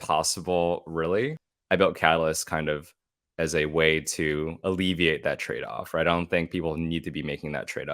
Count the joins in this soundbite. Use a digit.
1